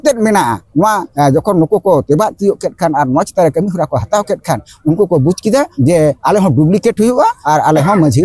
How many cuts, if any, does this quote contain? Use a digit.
3